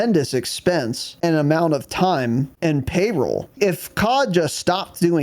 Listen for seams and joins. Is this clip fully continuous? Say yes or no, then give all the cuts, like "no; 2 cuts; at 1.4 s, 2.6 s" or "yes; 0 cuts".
no; 3 cuts; at 1.0 s, 2.5 s, 3.5 s